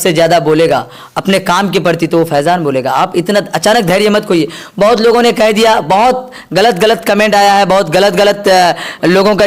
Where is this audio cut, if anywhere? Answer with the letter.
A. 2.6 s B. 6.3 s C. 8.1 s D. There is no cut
D